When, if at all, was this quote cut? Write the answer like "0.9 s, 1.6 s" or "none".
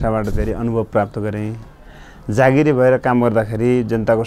none